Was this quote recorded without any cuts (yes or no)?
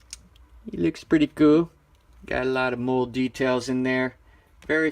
no